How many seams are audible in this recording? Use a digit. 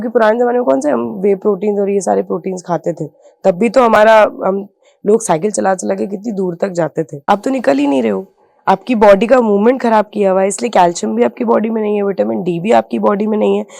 1